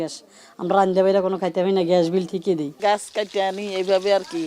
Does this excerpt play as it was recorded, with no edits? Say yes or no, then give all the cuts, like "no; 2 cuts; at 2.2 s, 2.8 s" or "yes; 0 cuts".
no; 1 cut; at 2.8 s